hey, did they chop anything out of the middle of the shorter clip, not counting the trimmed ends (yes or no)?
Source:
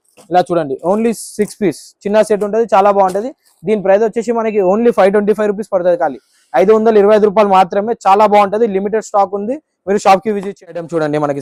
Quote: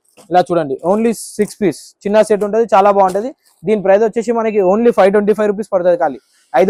no